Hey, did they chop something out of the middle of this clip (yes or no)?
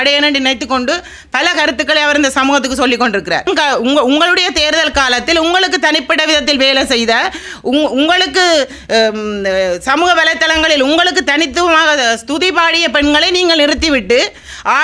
yes